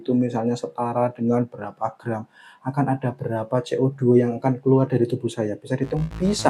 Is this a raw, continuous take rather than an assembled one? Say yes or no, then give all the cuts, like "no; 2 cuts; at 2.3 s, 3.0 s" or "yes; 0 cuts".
yes; 0 cuts